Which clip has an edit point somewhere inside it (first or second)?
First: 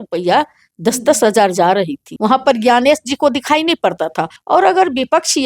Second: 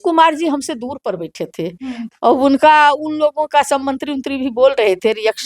first